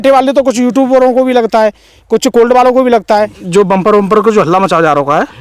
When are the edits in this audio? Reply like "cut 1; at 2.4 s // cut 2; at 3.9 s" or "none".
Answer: cut 1; at 3.4 s

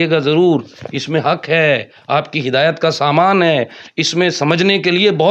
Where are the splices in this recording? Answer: none

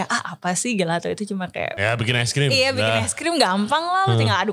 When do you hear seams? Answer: cut 1; at 1.7 s

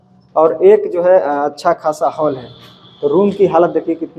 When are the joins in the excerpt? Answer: none

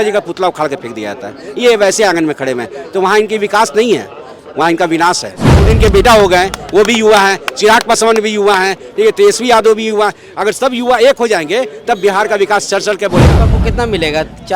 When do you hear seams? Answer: cut 1; at 5.7 s // cut 2; at 13.4 s

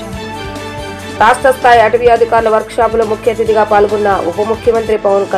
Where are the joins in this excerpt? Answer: cut 1; at 1.0 s

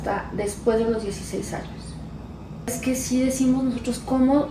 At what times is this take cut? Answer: cut 1; at 2.8 s

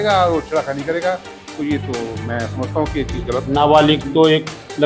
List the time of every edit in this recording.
cut 1; at 3.5 s

